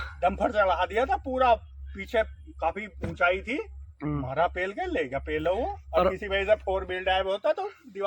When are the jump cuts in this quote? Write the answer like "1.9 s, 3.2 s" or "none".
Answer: none